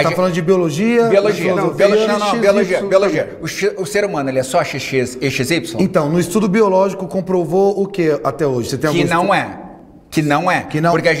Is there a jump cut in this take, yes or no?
no